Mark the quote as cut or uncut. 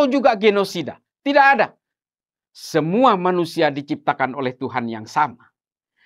uncut